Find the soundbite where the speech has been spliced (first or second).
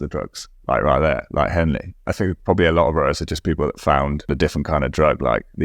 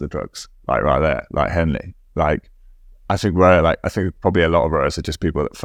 first